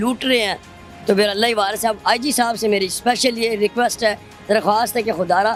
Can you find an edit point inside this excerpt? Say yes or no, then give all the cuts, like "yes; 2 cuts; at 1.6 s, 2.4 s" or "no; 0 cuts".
no; 0 cuts